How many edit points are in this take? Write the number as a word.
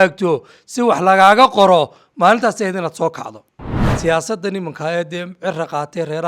one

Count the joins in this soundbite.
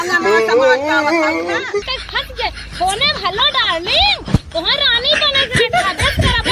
one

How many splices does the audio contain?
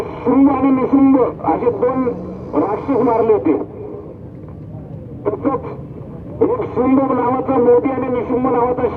zero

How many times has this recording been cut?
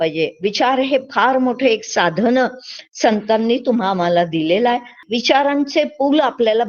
one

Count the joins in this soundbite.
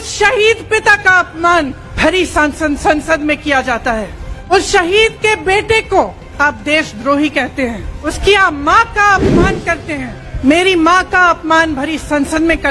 five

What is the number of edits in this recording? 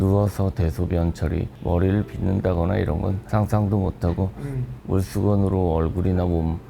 two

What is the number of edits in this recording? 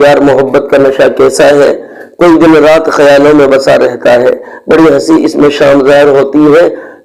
zero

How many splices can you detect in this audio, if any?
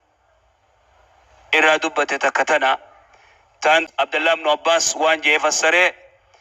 one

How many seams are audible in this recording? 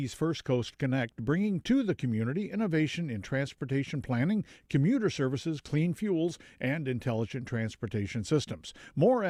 zero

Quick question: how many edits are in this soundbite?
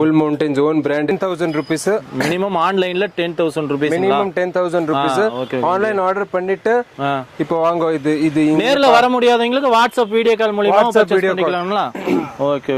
one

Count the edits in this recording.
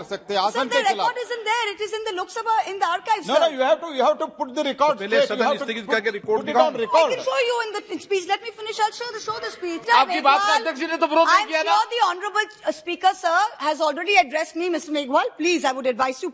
one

